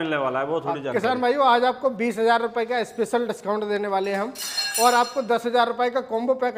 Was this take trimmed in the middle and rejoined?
no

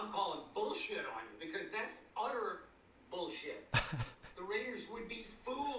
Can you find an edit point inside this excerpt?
no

